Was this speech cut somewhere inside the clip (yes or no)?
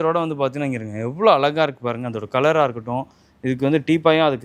no